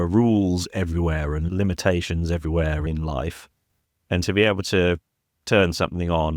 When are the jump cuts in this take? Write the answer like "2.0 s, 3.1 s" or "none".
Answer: 1.4 s, 2.9 s